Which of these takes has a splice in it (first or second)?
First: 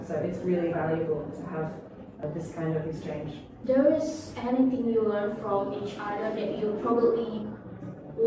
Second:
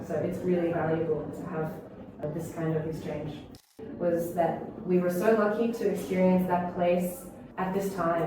second